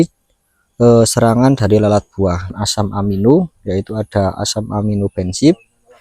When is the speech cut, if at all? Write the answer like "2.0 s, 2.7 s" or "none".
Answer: 2.5 s